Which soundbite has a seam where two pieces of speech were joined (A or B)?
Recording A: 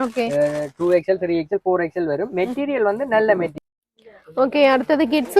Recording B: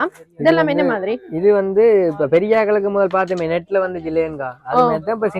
A